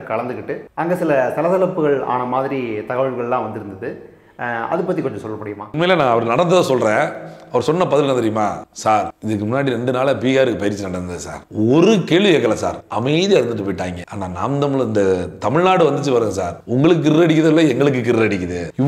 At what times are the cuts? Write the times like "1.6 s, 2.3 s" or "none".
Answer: 5.7 s

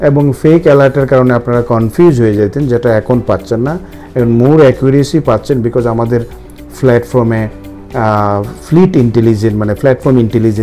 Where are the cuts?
none

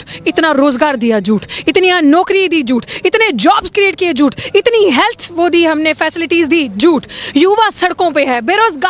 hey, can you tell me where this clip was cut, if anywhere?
none

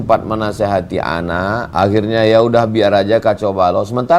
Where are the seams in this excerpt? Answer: 1.7 s

